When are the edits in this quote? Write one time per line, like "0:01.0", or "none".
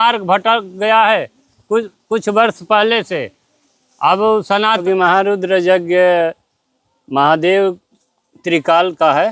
0:04.8